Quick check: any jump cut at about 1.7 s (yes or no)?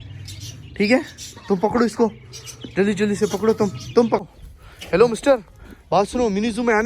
no